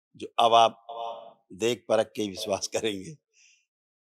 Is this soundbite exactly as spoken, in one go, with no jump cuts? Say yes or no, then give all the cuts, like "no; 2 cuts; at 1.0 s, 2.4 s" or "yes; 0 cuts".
yes; 0 cuts